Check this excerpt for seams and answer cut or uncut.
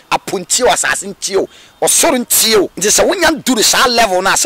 cut